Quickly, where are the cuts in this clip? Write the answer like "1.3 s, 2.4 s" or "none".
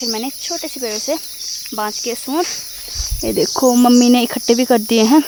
none